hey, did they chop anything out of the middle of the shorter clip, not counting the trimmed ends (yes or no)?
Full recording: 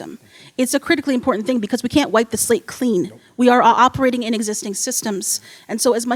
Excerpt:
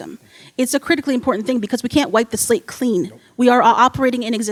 no